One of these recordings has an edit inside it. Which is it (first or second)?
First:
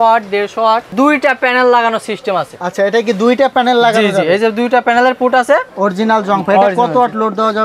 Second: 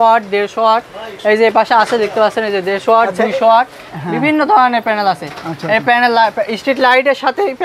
first